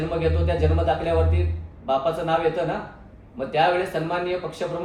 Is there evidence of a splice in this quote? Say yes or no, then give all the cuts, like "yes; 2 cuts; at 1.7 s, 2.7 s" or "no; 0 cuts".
no; 0 cuts